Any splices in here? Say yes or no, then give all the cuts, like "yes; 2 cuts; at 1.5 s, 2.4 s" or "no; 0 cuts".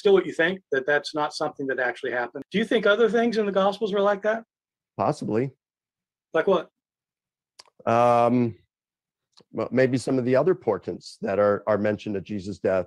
yes; 1 cut; at 2.4 s